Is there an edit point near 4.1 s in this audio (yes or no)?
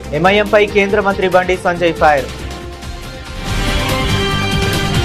no